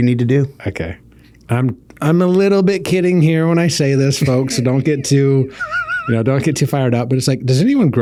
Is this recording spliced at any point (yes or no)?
no